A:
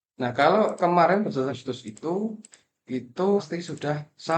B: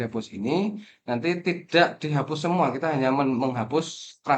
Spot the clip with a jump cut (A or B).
A